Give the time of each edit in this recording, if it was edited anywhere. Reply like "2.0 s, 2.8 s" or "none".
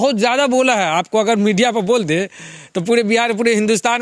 none